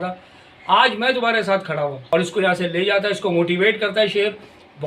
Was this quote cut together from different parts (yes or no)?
yes